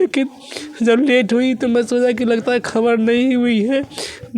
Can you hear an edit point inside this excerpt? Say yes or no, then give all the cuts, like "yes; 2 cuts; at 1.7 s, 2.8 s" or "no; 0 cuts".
no; 0 cuts